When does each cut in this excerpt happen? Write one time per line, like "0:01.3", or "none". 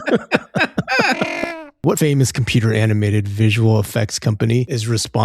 0:01.6

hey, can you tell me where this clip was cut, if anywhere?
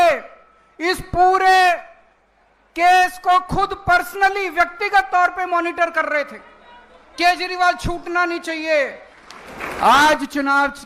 0:09.1

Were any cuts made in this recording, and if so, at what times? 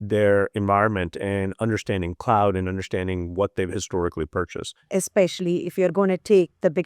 0:04.8

